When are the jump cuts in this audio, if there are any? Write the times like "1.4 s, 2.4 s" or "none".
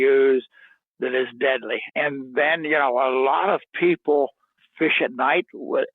1.8 s

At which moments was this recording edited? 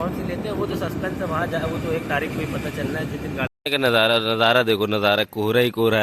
3.5 s

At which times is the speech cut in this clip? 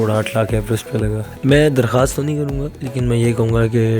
1.2 s

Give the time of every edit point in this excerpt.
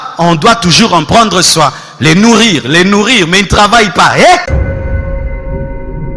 4.5 s

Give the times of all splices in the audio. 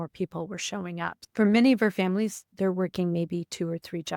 none

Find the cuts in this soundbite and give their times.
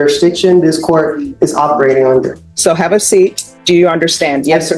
2.4 s, 3.5 s

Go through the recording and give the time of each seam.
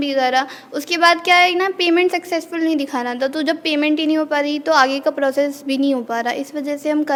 none

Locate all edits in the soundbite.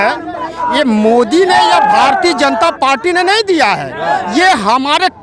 none

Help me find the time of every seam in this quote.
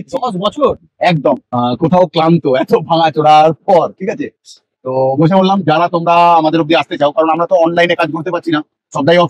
1.5 s

